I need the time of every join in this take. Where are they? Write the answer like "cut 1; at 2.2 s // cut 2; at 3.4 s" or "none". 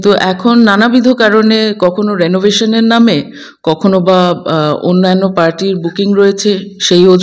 none